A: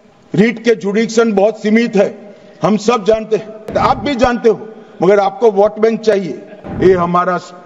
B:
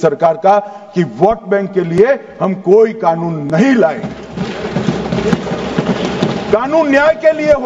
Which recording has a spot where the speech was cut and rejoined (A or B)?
A